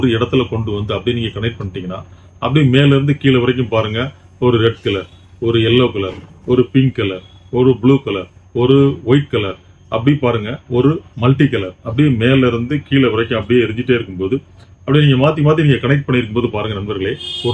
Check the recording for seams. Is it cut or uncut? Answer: uncut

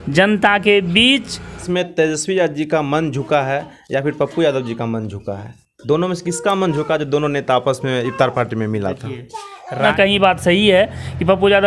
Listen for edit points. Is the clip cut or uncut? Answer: cut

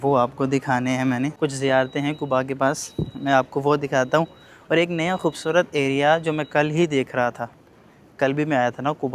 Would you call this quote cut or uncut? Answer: uncut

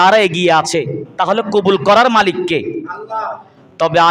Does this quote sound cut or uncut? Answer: uncut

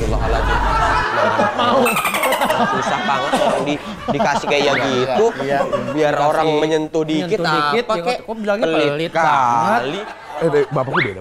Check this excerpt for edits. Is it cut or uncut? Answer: uncut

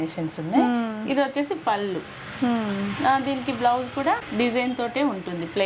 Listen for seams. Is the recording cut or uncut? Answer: uncut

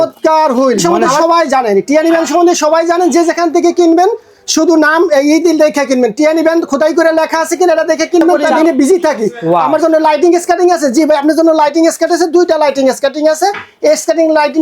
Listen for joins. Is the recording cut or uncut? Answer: cut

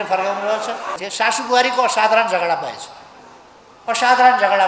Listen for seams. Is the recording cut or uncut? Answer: cut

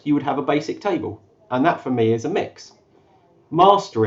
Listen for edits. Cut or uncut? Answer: uncut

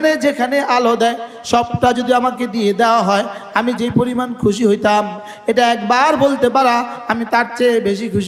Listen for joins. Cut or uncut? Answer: uncut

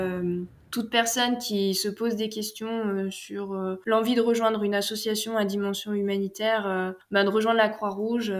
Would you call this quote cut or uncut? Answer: uncut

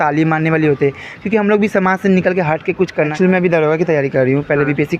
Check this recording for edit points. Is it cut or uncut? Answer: cut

